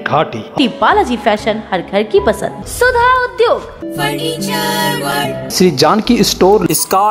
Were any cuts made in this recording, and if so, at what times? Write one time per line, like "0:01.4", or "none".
none